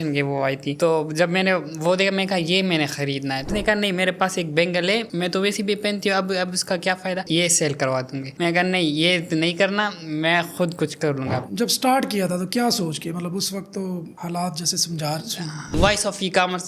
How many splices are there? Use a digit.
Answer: 3